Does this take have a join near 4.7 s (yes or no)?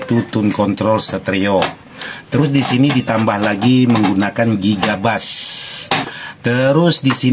no